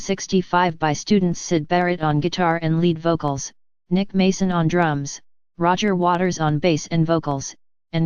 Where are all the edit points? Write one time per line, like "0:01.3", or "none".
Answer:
none